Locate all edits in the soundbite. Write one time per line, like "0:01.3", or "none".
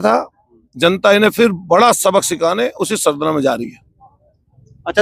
none